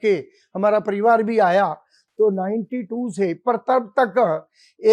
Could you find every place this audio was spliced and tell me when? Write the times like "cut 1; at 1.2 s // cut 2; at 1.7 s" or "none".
none